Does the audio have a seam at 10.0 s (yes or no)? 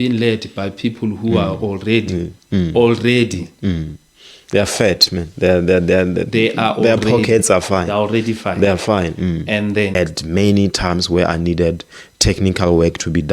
yes